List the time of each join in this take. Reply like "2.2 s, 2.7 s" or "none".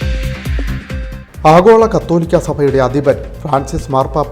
0.9 s